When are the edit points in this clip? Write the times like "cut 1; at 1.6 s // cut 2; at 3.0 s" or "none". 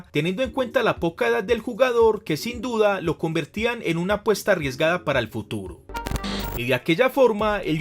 cut 1; at 6.0 s